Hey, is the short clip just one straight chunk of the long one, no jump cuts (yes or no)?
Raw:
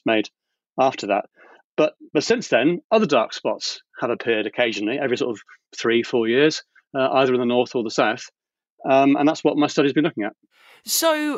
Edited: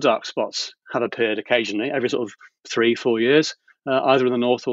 yes